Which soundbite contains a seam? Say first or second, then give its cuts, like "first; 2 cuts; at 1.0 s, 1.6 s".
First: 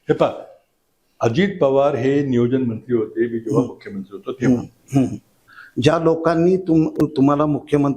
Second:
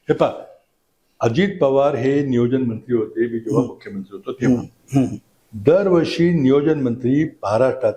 first; 1 cut; at 5.4 s